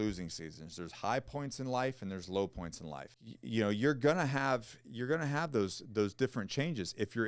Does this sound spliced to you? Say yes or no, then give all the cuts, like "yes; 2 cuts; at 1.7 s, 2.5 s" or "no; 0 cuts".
no; 0 cuts